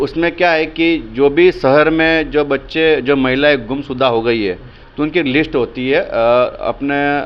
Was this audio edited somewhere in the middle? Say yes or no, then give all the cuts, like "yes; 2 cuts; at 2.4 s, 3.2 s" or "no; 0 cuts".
no; 0 cuts